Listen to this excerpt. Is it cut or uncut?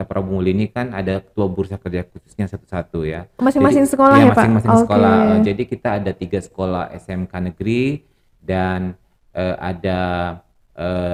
uncut